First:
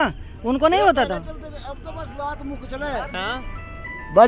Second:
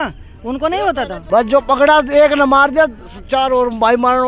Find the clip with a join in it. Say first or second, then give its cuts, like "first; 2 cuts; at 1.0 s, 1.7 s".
second; 1 cut; at 1.2 s